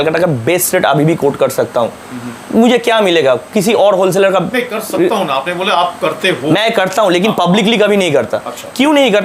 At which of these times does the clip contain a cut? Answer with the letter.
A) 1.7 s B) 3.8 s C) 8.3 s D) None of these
D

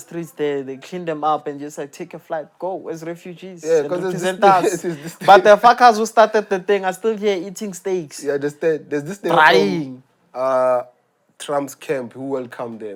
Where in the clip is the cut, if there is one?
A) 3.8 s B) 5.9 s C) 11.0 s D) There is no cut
D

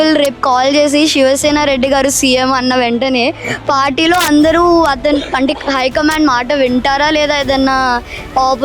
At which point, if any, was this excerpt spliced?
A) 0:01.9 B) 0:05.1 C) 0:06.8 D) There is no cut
D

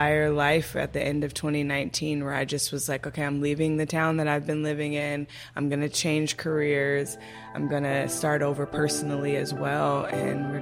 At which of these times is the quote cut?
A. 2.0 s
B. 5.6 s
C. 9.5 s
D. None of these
D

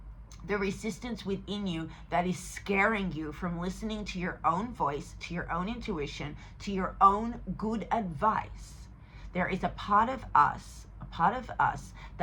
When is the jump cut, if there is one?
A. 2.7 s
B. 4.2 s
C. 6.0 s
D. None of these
D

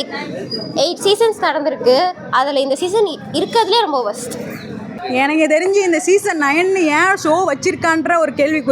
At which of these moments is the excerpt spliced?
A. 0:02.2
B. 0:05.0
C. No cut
B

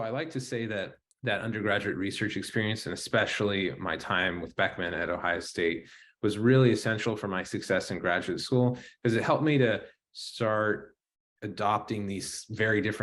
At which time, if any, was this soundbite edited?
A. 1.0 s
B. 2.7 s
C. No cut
A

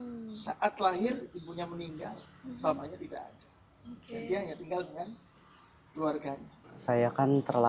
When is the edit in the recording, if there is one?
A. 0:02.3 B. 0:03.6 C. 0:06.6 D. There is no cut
C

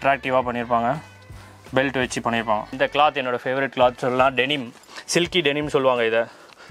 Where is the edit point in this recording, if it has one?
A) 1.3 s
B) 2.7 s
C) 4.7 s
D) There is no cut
B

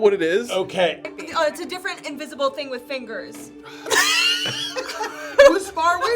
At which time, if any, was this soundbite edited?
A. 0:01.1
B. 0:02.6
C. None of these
A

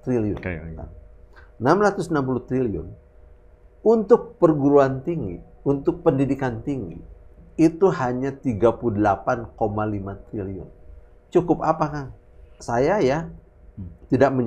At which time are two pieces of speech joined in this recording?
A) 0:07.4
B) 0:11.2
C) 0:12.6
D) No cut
C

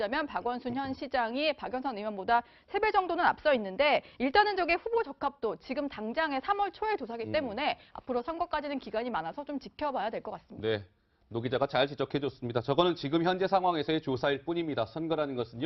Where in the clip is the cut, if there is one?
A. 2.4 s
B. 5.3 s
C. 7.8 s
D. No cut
B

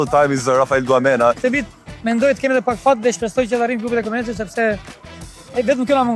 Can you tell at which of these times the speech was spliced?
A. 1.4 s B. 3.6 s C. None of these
A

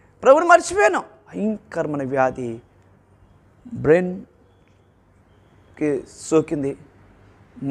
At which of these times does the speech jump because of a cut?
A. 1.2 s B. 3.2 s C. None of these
A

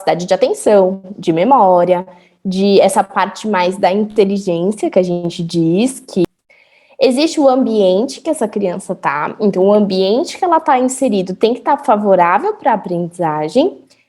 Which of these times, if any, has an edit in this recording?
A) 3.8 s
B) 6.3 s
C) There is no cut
B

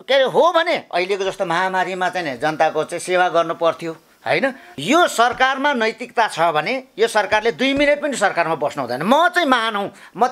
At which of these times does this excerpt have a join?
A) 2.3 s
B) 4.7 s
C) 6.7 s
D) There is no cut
B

